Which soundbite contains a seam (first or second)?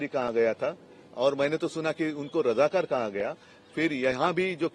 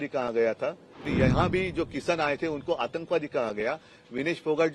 second